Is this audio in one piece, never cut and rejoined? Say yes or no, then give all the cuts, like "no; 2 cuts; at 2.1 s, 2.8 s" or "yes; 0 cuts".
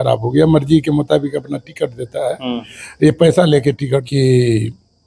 no; 1 cut; at 4.1 s